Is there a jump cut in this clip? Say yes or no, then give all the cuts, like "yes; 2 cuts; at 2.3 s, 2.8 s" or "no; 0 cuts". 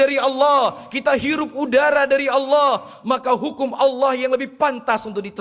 no; 0 cuts